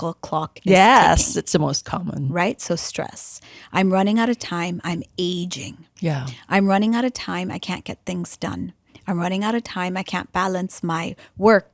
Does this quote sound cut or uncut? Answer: uncut